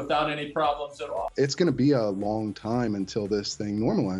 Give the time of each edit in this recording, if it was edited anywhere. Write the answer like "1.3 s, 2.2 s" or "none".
1.3 s

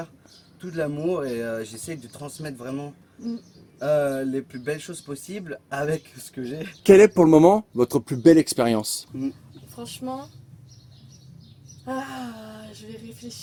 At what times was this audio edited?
none

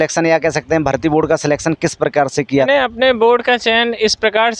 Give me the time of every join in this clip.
2.7 s

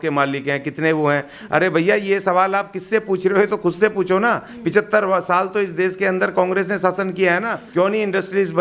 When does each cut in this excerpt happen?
7.6 s

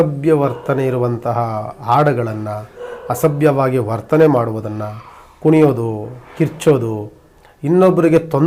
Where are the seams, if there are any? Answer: none

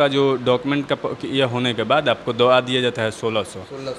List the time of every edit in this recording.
none

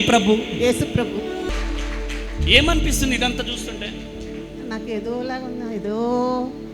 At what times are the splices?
1.6 s

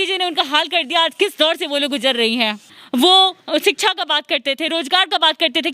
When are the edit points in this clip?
2.7 s

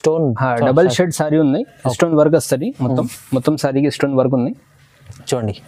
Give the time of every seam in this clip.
none

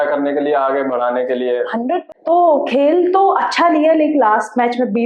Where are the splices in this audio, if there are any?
2.1 s

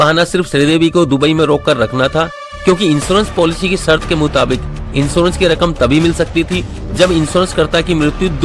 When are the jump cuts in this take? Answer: none

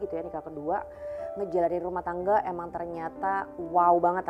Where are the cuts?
none

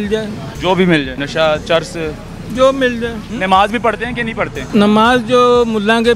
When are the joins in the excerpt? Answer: 1.2 s, 3.2 s, 4.6 s

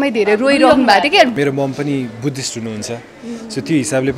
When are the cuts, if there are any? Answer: 1.3 s

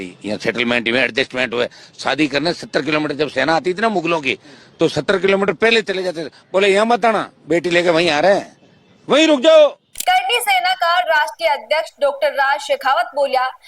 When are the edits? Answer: 9.9 s

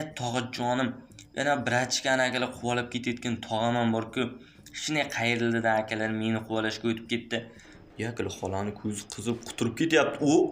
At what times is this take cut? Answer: 7.8 s

